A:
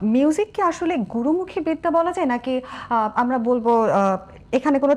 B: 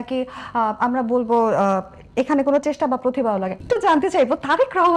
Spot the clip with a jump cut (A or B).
B